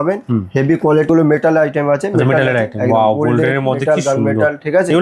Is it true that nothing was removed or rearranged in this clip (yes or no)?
no